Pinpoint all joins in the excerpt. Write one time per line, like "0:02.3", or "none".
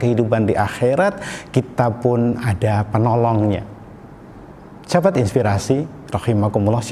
none